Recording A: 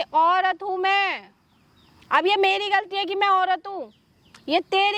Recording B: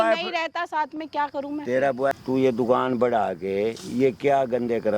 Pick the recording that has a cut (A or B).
B